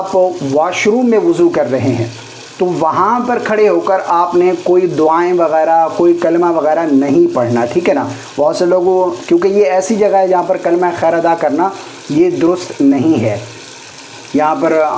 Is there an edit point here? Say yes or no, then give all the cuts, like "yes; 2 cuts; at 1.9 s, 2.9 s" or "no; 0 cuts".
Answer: no; 0 cuts